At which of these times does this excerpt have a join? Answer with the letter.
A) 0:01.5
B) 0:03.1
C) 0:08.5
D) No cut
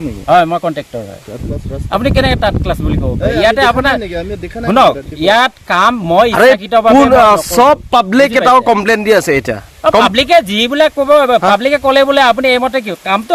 A